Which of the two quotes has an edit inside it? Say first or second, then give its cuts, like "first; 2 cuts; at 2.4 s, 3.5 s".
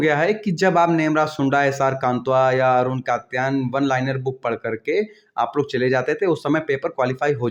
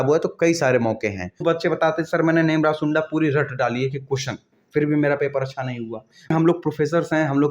second; 2 cuts; at 1.4 s, 6.3 s